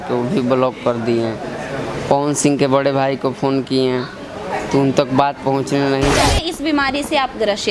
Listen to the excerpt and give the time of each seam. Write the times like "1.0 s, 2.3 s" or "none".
6.2 s